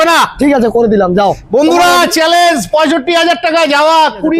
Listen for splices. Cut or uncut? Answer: uncut